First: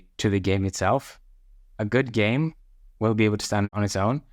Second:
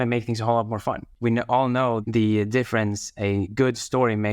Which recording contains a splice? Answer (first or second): second